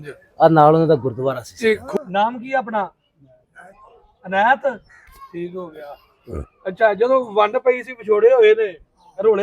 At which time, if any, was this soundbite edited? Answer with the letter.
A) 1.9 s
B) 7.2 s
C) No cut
A